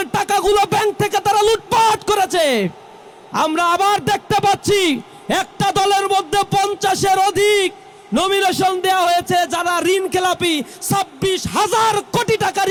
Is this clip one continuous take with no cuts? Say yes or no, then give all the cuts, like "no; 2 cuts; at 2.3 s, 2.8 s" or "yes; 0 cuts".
yes; 0 cuts